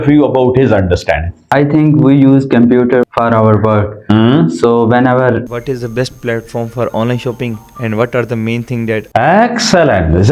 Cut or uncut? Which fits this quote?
cut